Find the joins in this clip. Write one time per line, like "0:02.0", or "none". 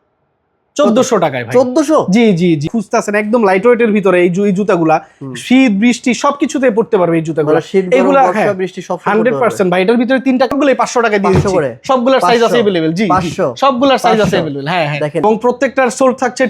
0:02.7
0:10.5
0:15.2

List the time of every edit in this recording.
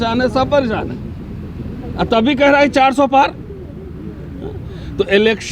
none

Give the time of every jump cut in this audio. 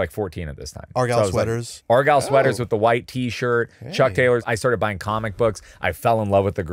0:01.7
0:04.4

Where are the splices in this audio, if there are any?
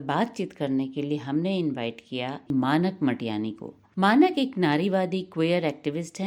none

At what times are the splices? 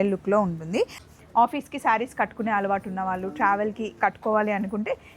0:00.9

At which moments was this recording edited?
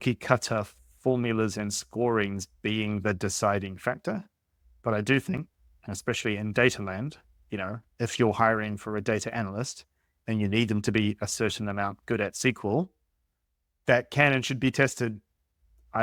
none

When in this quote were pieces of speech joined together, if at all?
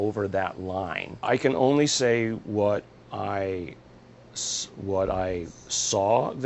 0:01.0

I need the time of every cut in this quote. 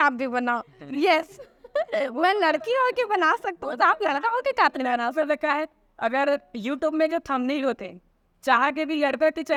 none

